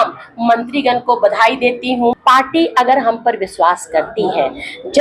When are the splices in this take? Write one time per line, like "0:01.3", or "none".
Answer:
0:02.2